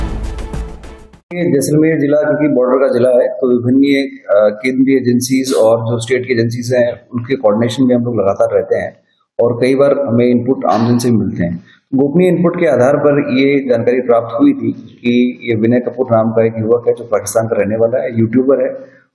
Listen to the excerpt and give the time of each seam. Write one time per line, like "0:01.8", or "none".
0:01.2